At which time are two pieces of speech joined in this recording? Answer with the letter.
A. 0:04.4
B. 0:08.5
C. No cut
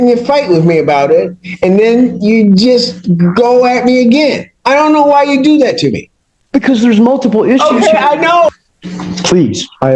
B